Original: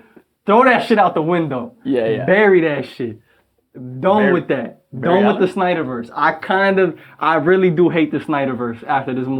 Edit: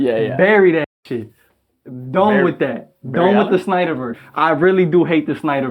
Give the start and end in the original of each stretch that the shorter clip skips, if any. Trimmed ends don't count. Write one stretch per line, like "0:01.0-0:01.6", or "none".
0:06.1-0:07.0